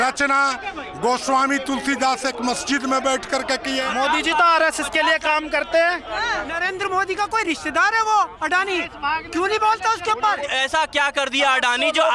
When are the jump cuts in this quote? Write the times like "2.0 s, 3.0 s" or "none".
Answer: 3.9 s, 6.5 s, 10.5 s